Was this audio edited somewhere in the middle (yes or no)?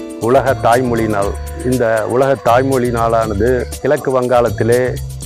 no